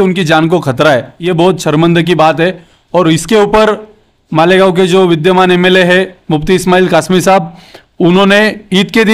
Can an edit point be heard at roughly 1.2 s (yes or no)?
yes